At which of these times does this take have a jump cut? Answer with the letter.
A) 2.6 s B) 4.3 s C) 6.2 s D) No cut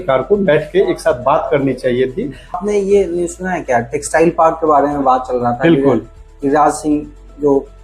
A